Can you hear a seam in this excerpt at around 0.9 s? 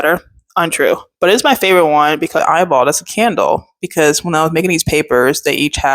no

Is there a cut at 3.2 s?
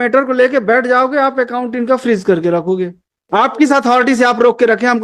yes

